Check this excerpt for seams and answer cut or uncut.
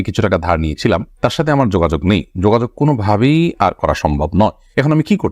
uncut